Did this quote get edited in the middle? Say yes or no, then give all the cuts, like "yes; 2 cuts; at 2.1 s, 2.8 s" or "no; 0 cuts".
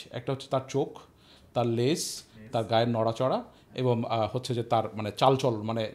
no; 0 cuts